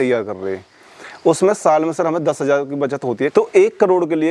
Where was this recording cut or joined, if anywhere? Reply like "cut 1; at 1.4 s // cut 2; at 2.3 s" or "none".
cut 1; at 3.3 s

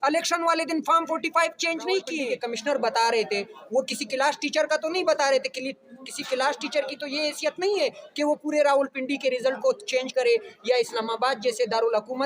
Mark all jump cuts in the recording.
cut 1; at 2.2 s

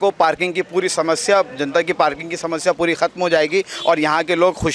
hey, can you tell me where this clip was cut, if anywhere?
none

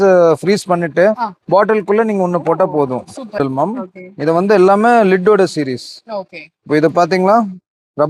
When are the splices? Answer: cut 1; at 3.4 s

